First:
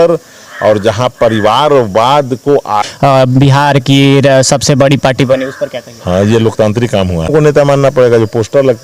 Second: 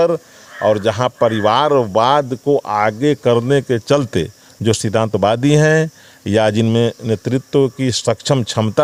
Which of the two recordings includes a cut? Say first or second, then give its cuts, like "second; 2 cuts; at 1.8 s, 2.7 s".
first; 2 cuts; at 2.7 s, 7.3 s